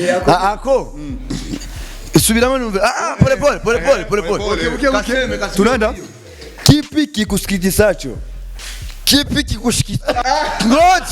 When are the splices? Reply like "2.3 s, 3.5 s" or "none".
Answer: 10.2 s